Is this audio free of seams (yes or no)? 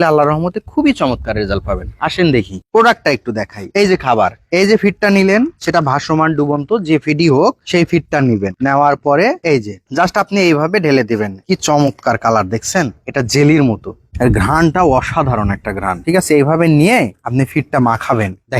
yes